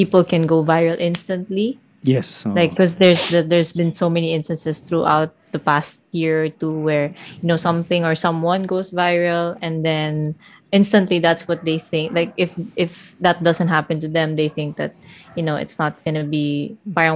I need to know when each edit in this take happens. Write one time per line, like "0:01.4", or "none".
none